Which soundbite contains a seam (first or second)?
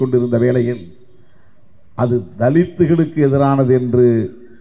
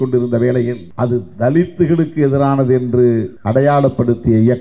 second